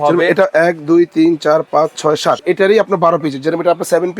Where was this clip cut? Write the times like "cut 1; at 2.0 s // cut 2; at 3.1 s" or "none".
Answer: cut 1; at 2.4 s